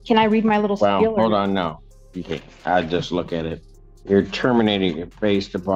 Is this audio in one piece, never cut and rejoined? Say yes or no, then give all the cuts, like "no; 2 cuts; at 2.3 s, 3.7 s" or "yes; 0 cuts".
yes; 0 cuts